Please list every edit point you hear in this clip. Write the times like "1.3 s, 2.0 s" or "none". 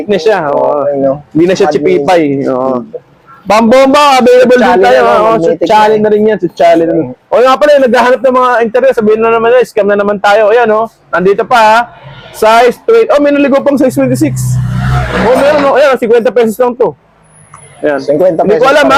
none